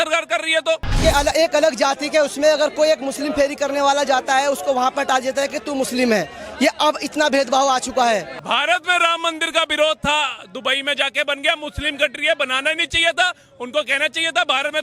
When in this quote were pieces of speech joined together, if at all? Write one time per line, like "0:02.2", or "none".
0:00.9
0:08.3

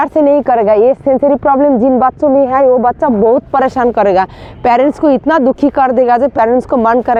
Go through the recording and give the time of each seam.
none

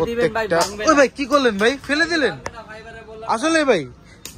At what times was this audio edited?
none

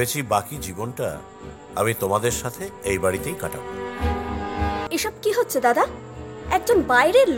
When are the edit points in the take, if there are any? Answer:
0:04.8

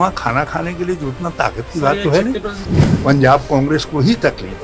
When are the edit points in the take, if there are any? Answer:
0:02.6

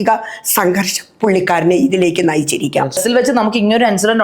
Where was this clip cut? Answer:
0:03.0

